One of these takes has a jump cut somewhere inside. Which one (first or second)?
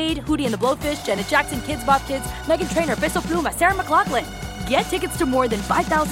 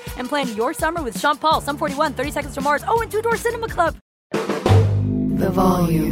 second